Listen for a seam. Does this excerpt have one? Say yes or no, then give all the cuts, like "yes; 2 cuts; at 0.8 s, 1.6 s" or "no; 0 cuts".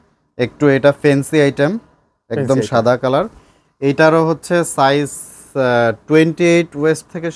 no; 0 cuts